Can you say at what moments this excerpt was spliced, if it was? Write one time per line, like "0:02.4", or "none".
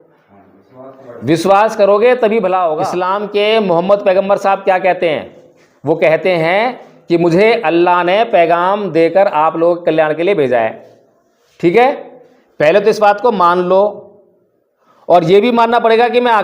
0:03.0